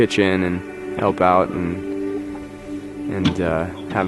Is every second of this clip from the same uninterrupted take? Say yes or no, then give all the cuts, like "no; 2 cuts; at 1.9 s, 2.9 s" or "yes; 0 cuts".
yes; 0 cuts